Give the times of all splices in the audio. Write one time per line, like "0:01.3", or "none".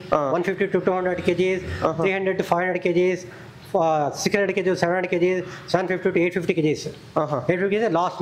none